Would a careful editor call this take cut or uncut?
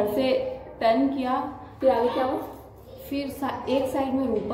cut